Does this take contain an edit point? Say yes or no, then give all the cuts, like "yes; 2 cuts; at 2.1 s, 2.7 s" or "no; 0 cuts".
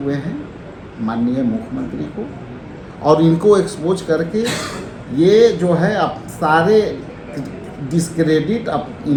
no; 0 cuts